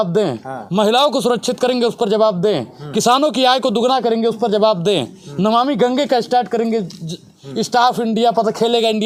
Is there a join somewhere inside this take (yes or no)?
no